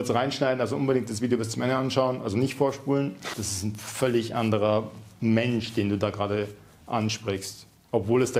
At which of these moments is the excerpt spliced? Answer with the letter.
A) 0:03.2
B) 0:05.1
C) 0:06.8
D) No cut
A